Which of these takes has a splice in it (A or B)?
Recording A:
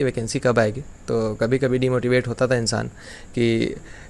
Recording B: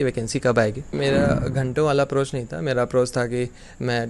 B